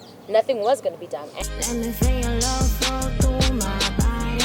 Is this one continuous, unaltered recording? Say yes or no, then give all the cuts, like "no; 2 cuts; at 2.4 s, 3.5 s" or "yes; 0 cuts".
no; 1 cut; at 1.3 s